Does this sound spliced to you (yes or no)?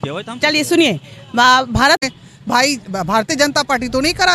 yes